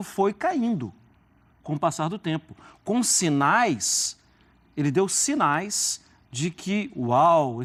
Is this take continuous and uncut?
yes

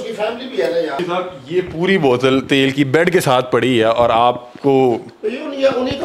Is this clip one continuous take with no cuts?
no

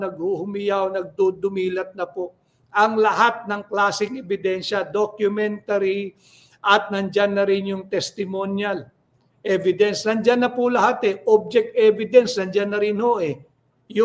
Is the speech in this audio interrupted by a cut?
no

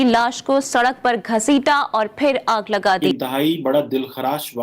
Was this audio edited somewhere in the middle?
yes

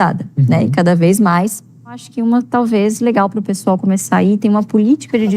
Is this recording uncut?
no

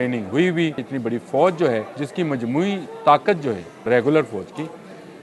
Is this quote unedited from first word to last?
no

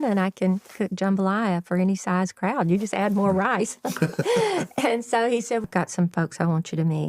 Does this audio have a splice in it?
yes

